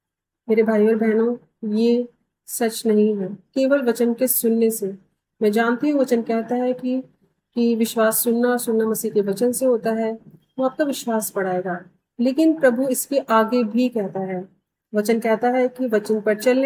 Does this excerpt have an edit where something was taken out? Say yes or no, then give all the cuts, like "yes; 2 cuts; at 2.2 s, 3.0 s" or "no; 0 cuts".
no; 0 cuts